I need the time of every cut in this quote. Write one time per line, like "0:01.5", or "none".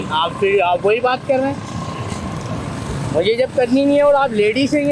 none